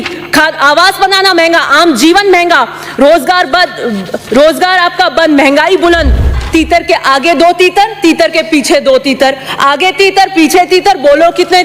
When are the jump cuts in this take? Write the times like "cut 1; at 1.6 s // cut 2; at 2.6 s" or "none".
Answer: cut 1; at 6.4 s